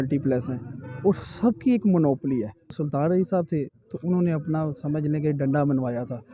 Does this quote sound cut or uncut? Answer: cut